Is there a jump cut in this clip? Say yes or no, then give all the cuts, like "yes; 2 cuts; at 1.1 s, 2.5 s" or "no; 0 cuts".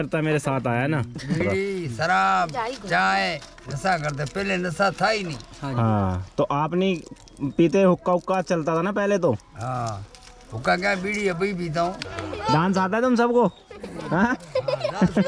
yes; 2 cuts; at 1.4 s, 12.0 s